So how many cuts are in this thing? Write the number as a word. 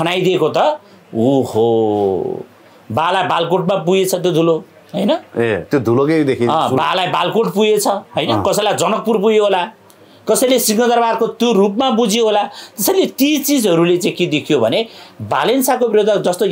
zero